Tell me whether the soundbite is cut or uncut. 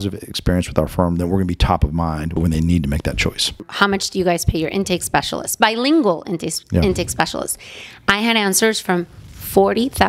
cut